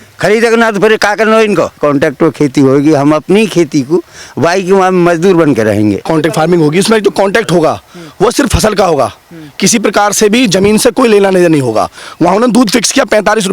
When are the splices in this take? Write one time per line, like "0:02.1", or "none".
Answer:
0:01.8
0:06.1
0:12.0